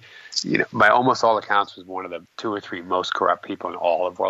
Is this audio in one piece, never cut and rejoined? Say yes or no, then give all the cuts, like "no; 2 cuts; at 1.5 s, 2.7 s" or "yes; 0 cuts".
no; 1 cut; at 2.2 s